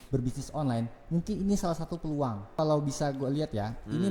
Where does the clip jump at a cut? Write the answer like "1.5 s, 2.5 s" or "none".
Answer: 2.5 s